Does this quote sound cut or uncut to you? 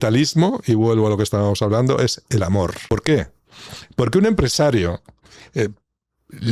cut